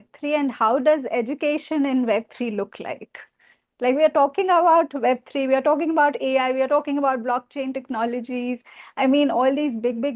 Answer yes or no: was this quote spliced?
no